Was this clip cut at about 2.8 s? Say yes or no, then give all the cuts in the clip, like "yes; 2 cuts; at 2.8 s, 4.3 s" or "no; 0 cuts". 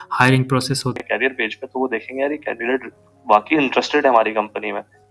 no; 1 cut; at 1.0 s